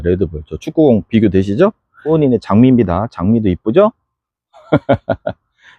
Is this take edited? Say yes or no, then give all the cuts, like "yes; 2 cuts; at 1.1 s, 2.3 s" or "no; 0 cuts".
yes; 1 cut; at 2.1 s